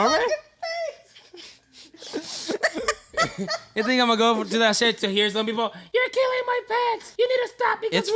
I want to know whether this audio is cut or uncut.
cut